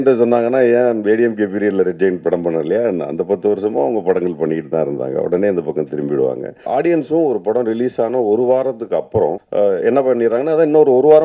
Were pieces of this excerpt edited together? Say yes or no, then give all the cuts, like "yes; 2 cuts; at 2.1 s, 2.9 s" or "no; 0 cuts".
yes; 2 cuts; at 6.5 s, 9.4 s